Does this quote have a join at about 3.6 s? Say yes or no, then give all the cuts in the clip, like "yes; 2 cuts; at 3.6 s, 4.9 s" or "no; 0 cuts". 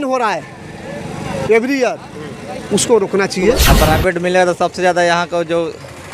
yes; 1 cut; at 3.6 s